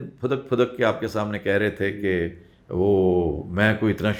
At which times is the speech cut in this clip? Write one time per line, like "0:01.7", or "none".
none